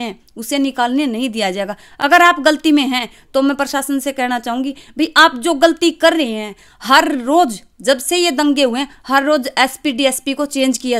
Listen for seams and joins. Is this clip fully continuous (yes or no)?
yes